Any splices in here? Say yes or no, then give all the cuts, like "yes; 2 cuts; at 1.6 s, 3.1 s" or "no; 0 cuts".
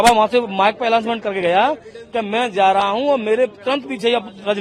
no; 0 cuts